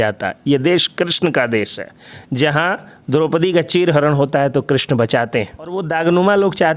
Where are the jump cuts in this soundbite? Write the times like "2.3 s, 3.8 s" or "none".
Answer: 5.8 s